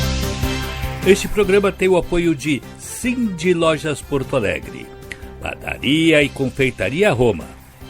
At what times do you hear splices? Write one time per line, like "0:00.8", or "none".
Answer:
0:01.0

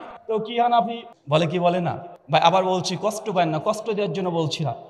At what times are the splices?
0:01.1
0:02.1

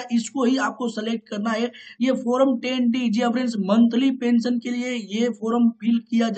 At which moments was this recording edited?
none

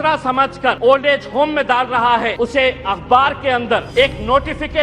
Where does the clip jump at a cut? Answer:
0:00.8
0:02.3
0:03.9

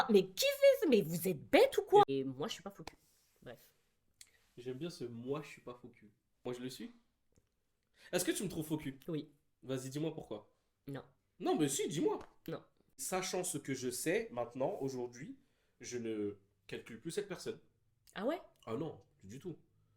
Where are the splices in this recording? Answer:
0:02.1
0:13.0

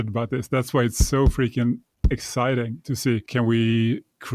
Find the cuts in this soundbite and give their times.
0:03.3

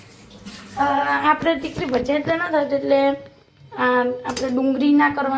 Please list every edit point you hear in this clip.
none

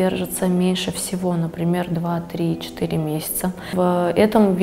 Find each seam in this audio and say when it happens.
0:03.7

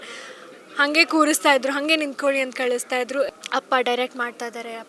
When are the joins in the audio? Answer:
0:03.3

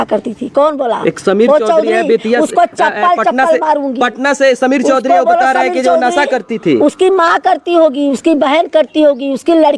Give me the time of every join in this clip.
none

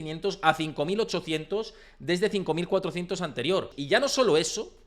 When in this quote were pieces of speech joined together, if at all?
0:03.8

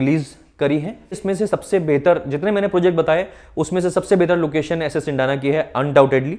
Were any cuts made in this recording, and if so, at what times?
0:01.2

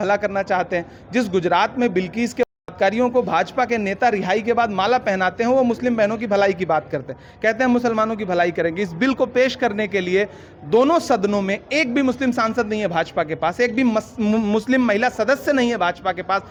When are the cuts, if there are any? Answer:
none

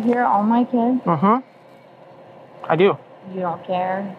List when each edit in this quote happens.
none

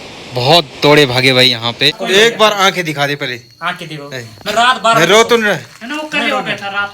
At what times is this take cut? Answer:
0:02.0

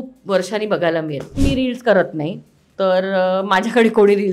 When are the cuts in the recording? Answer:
0:01.4

